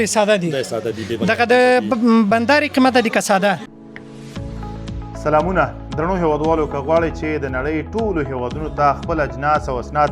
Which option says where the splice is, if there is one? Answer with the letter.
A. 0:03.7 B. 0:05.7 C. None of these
A